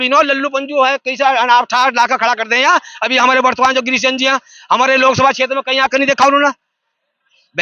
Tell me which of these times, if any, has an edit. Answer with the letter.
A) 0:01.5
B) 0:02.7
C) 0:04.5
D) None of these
D